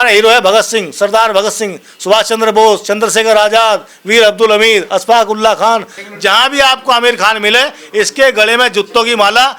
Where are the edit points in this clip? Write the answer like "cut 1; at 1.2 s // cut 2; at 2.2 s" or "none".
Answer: cut 1; at 5.9 s